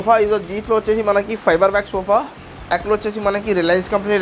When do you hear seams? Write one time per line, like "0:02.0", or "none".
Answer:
0:02.7